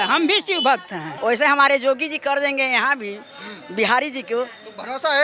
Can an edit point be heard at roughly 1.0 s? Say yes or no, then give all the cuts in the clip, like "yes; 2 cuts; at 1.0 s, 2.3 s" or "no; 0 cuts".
yes; 1 cut; at 1.0 s